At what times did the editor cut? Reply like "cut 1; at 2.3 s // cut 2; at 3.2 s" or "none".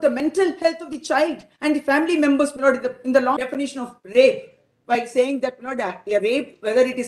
cut 1; at 3.4 s